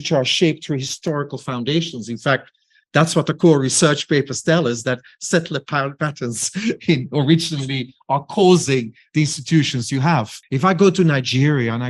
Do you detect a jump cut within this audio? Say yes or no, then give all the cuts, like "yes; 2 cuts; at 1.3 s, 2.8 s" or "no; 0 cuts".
yes; 1 cut; at 10.4 s